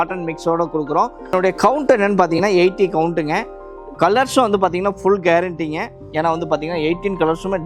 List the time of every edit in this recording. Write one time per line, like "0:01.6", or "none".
0:01.2